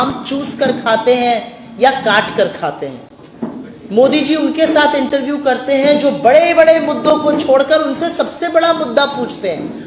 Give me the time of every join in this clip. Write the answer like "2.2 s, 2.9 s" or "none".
none